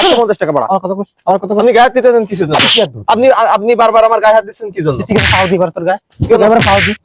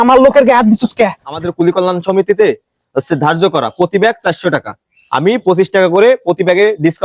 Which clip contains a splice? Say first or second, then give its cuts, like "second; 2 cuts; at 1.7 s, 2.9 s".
second; 1 cut; at 1.5 s